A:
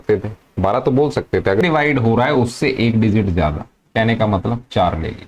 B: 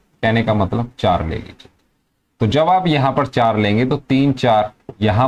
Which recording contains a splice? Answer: A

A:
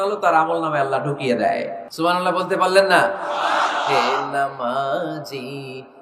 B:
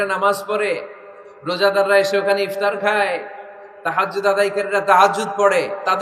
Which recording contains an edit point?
A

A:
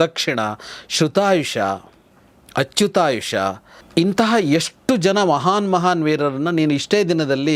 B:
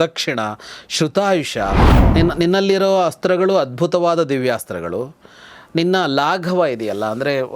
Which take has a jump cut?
B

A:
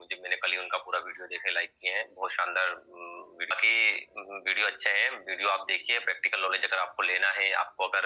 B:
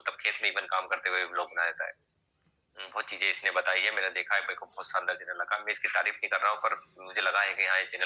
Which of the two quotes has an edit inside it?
A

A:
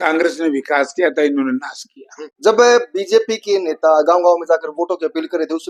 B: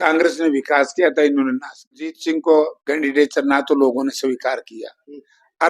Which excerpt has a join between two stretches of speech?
B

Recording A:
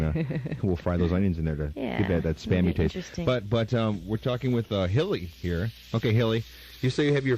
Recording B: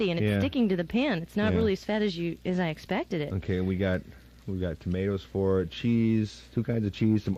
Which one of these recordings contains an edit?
A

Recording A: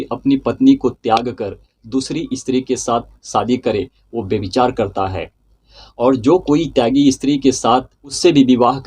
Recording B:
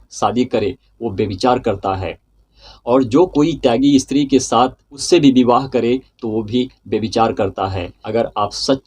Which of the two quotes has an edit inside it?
B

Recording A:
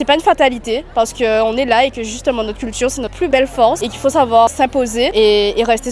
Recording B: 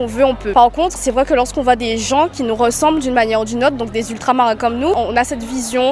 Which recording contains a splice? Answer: B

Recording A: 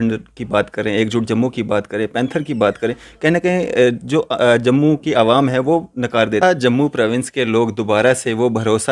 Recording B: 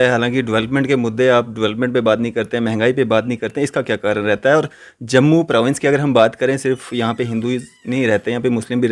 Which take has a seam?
A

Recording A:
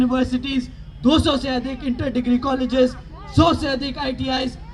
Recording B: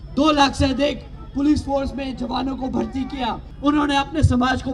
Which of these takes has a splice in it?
B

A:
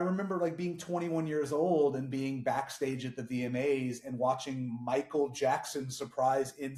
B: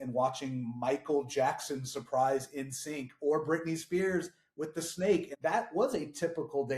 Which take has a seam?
B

